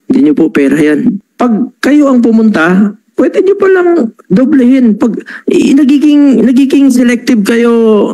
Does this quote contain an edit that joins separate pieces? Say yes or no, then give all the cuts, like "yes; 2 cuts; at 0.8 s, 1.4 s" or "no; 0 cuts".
yes; 1 cut; at 1.3 s